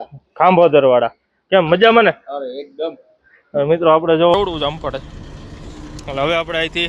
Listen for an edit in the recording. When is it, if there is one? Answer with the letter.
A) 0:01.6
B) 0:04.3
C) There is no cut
B